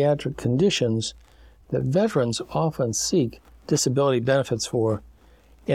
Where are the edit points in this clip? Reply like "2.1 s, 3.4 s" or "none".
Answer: none